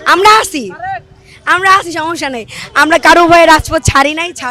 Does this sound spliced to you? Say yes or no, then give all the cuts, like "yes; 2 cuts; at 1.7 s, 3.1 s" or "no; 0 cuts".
no; 0 cuts